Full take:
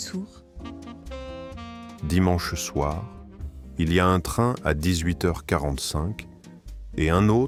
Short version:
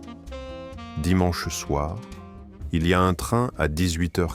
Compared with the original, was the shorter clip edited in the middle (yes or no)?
yes